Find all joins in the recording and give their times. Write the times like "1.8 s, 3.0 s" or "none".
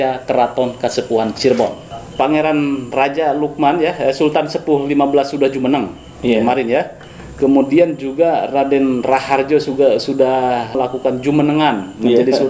2.0 s